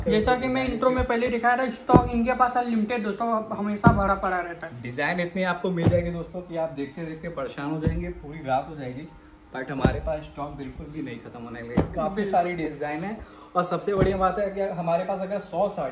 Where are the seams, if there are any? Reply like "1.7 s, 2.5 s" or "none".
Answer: none